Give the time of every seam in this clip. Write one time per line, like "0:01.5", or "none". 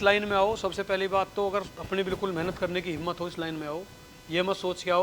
0:01.8